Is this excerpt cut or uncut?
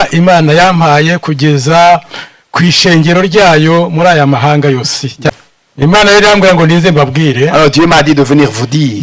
cut